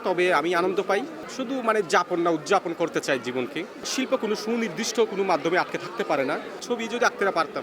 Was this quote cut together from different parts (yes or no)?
yes